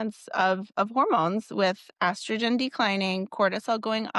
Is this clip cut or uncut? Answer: uncut